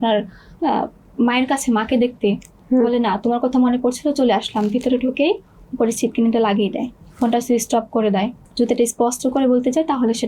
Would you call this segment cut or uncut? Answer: cut